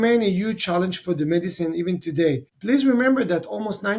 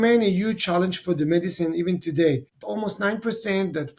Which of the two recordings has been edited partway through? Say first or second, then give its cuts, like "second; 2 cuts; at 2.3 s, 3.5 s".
second; 1 cut; at 2.6 s